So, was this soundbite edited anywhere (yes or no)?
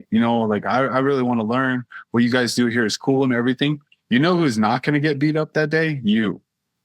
yes